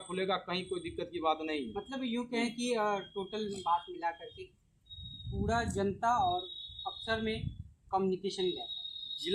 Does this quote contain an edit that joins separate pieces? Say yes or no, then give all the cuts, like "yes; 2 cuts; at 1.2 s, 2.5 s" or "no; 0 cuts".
no; 0 cuts